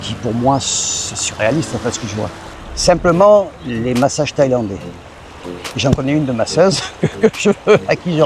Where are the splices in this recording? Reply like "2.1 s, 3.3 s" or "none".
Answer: 2.4 s